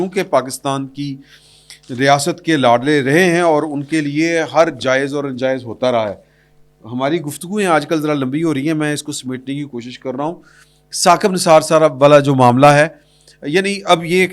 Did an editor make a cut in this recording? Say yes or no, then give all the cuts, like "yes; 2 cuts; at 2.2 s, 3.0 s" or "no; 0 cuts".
no; 0 cuts